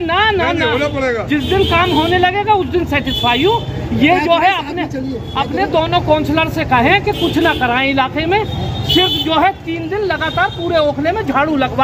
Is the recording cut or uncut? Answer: uncut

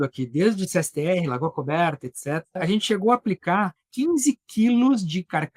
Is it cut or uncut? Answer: cut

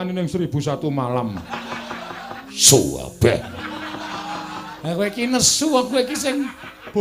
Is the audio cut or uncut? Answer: cut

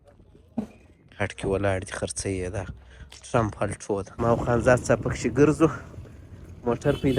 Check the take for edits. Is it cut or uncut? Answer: cut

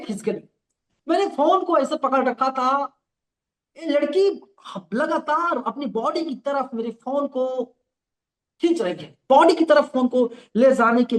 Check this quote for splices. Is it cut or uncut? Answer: uncut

